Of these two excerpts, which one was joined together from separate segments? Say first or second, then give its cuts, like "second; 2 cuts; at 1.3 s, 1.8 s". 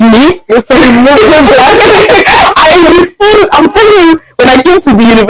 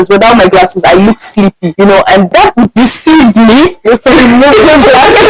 second; 2 cuts; at 1.6 s, 2.3 s